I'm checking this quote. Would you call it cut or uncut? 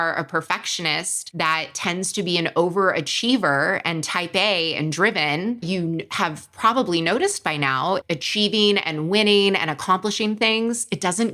cut